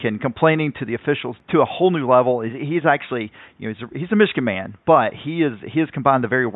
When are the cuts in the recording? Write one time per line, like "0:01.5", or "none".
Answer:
0:01.3